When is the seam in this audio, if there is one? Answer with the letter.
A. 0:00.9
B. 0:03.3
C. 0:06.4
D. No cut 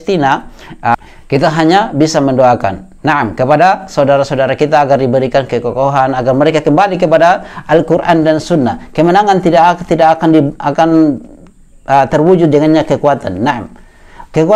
A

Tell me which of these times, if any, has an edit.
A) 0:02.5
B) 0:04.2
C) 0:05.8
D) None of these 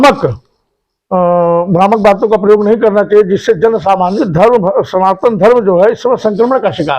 B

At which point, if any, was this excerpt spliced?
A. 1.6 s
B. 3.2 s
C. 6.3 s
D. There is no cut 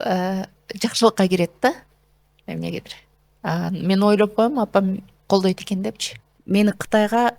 C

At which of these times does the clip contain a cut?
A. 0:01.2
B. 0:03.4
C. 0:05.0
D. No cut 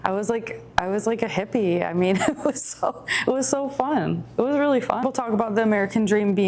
C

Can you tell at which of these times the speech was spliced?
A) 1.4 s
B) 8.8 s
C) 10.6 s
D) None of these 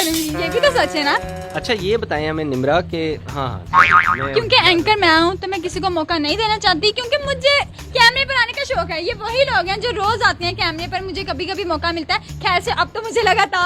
A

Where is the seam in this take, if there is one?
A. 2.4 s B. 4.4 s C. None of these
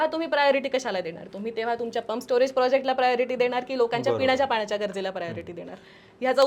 C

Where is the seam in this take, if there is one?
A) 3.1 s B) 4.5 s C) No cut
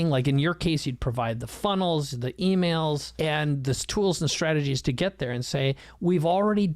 A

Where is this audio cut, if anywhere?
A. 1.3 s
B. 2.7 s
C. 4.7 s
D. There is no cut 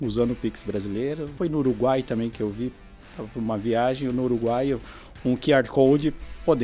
A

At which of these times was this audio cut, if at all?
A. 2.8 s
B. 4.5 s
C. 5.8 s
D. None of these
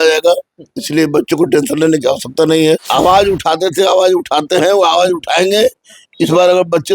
A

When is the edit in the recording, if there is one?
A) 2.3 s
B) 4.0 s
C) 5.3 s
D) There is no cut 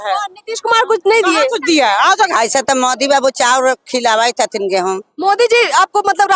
A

